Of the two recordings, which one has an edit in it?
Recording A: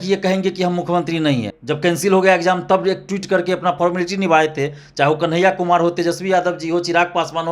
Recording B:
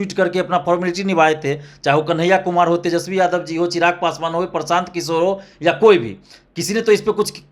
A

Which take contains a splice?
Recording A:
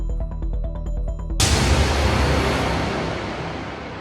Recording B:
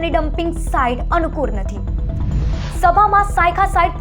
A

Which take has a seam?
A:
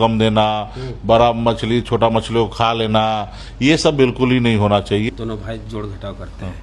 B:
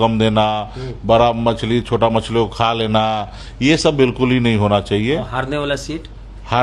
A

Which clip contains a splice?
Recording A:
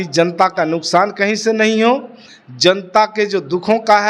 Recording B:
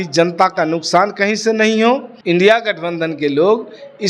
B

